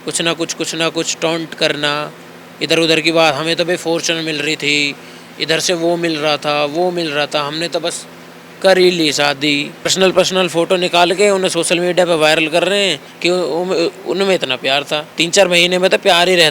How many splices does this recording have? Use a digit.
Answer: 2